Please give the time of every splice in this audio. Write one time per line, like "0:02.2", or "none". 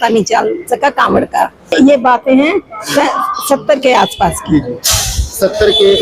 0:01.7

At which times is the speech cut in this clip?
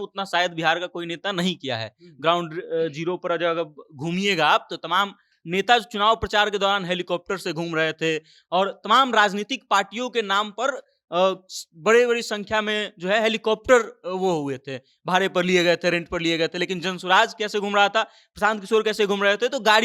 none

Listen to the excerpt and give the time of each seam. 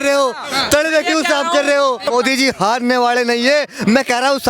0:02.0

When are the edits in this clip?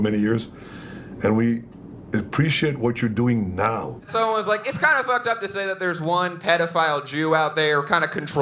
0:04.1

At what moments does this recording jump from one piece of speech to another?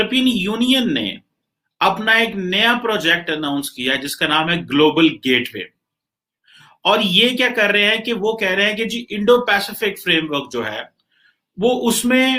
none

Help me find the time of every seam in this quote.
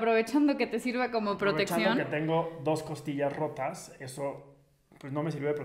none

